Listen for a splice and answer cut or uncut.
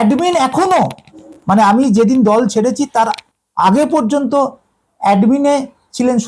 uncut